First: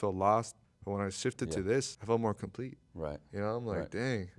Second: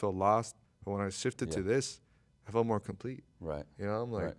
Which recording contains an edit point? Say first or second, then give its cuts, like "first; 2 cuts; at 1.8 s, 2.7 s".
first; 1 cut; at 2.0 s